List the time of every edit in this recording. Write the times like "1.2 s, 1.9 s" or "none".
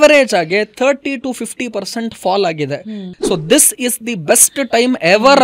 3.0 s